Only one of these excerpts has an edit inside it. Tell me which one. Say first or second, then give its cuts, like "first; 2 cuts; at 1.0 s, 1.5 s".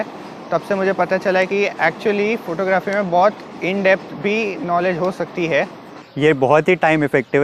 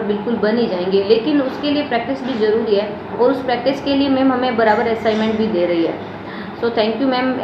first; 1 cut; at 6.0 s